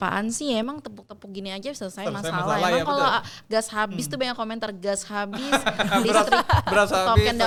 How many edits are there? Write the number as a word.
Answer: zero